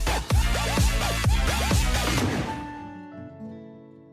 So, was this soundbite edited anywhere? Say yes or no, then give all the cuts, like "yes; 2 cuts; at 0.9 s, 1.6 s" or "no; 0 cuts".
yes; 1 cut; at 2.5 s